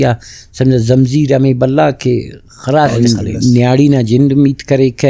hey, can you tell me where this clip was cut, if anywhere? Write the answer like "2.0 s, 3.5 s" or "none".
2.9 s